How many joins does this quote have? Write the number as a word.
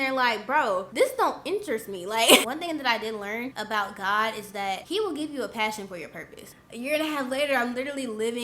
five